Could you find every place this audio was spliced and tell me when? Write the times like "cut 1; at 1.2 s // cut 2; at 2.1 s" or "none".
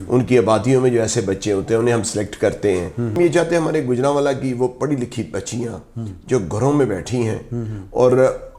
cut 1; at 3.2 s